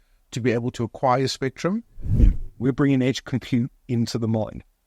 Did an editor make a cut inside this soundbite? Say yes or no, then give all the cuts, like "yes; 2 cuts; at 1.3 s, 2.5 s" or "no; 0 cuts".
yes; 1 cut; at 2.2 s